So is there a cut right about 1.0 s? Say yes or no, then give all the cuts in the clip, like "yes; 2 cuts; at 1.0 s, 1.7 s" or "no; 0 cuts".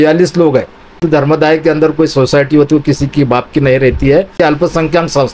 yes; 2 cuts; at 1.0 s, 4.4 s